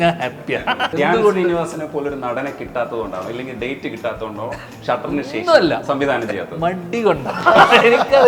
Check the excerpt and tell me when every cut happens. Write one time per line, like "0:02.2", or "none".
0:00.9